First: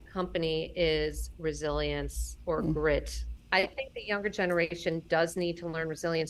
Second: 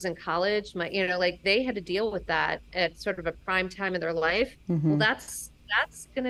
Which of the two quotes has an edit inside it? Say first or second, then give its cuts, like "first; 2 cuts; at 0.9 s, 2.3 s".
first; 1 cut; at 3.3 s